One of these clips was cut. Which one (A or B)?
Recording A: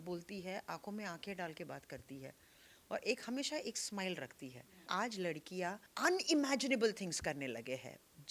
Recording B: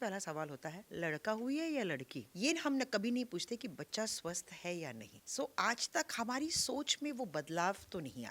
A